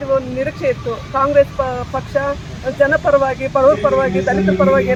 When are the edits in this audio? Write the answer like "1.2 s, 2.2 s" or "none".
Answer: none